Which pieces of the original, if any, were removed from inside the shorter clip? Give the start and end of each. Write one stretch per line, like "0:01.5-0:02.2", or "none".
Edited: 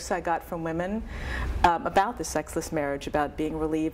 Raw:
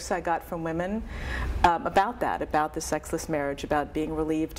0:02.2-0:02.7